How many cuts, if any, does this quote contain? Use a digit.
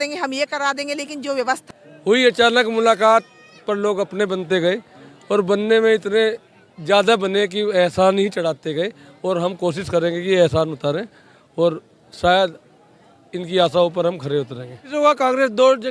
2